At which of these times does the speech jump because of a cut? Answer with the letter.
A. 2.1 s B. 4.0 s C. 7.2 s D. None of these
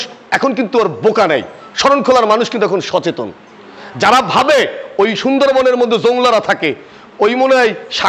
D